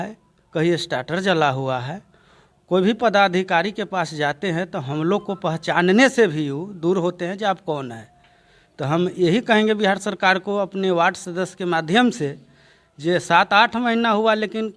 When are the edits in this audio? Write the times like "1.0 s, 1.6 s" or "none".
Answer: none